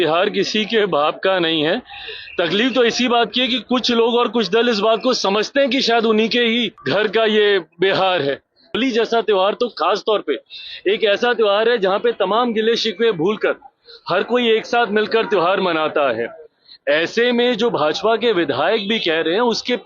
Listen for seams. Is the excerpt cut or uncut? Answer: cut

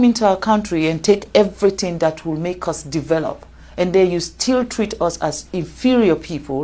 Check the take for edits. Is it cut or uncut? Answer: uncut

